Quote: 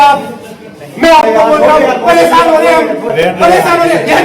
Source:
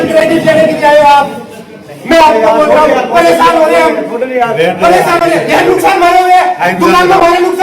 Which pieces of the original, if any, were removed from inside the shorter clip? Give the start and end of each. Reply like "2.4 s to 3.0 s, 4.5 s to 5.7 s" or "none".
4.2 s to 4.5 s